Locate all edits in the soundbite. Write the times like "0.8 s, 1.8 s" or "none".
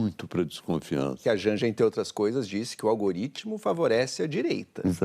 1.2 s